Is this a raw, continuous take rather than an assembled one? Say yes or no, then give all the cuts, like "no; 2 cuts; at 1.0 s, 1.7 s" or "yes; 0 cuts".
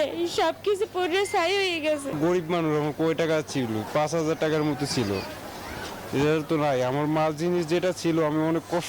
no; 1 cut; at 2.2 s